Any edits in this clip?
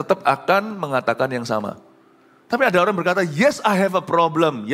no; 0 cuts

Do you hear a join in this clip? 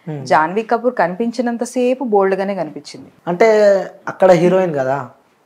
yes; 1 cut; at 3.1 s

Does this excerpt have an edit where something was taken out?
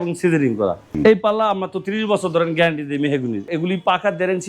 yes; 2 cuts; at 0.9 s, 3.4 s

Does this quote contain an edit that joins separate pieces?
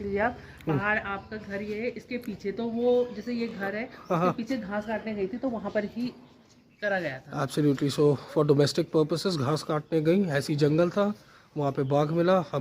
no; 0 cuts

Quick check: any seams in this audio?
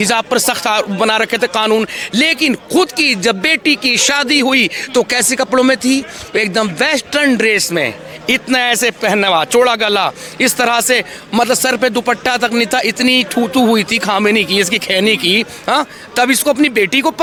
no; 0 cuts

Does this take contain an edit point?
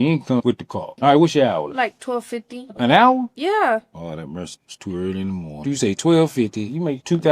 yes; 2 cuts; at 0.9 s, 6.1 s

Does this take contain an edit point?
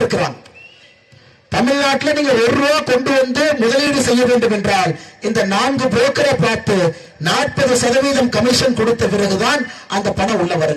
no; 0 cuts

